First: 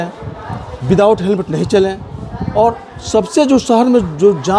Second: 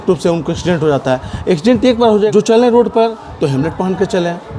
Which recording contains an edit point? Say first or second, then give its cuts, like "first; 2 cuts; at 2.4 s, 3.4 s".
second; 1 cut; at 2.3 s